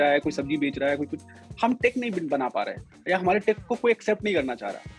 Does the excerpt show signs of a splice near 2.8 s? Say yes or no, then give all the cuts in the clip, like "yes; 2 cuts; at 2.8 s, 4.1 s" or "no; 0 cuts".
no; 0 cuts